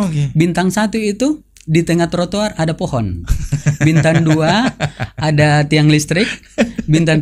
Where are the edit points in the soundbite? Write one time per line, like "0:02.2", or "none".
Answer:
none